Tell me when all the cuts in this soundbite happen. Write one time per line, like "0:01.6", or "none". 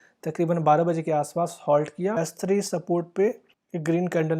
0:02.1